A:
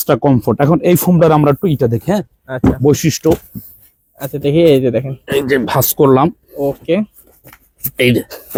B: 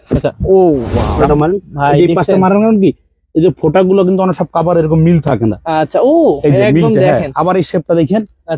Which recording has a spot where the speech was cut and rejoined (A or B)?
B